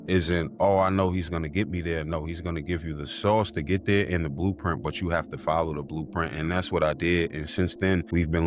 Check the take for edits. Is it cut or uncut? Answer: uncut